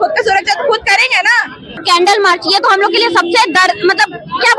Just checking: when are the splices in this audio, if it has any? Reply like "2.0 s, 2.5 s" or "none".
1.7 s